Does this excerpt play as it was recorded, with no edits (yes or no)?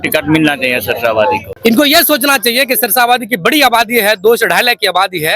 no